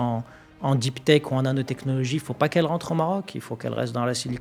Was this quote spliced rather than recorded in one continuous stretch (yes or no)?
no